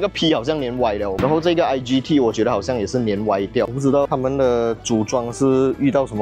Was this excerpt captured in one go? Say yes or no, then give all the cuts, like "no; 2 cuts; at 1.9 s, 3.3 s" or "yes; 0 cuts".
no; 1 cut; at 1.2 s